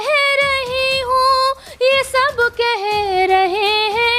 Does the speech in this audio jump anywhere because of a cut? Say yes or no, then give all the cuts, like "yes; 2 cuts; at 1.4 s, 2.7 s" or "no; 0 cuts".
no; 0 cuts